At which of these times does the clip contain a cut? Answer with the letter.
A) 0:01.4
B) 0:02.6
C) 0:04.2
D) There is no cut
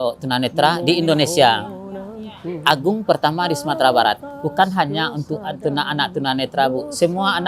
C